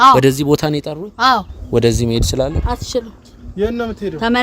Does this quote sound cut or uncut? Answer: cut